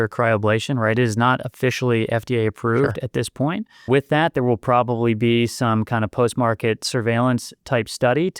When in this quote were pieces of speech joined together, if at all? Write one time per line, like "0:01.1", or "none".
0:03.9